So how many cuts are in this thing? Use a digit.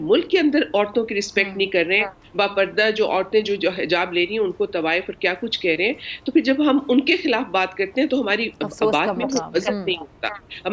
0